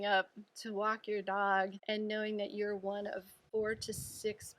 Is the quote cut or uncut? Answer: cut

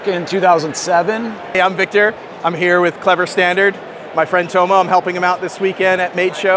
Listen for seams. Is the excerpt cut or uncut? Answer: cut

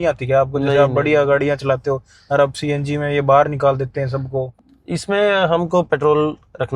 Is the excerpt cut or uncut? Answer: cut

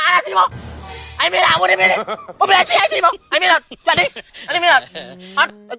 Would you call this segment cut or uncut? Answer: uncut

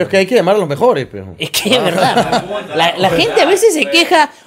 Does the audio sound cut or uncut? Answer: uncut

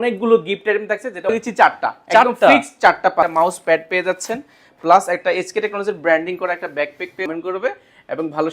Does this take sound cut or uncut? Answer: cut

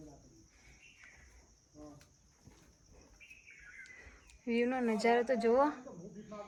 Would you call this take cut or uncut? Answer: uncut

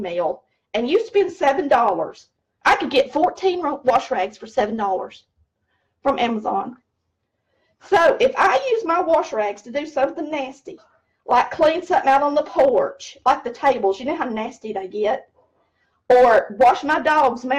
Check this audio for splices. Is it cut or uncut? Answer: uncut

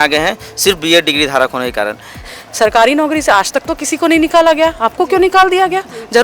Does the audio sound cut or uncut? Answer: cut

